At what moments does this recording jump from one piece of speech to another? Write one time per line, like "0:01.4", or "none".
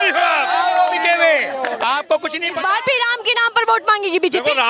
0:02.5

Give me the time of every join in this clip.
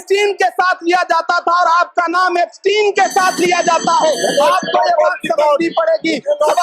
none

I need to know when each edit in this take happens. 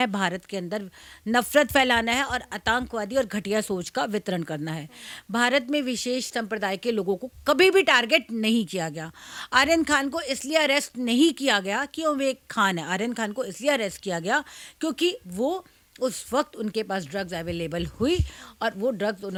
none

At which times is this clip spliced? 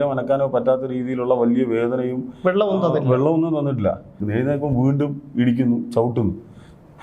0:04.2

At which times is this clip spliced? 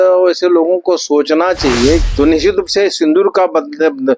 0:02.0

